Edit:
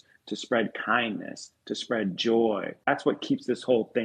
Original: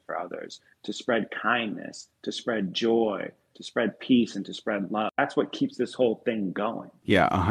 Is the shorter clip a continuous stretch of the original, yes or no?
no